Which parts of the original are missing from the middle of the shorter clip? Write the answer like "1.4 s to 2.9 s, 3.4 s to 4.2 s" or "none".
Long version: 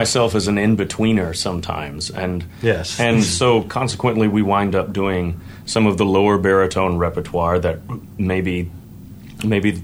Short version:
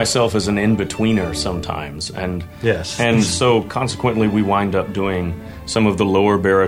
none